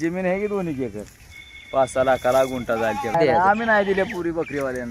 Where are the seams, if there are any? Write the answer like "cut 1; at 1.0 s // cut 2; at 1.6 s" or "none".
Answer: cut 1; at 1.1 s // cut 2; at 3.1 s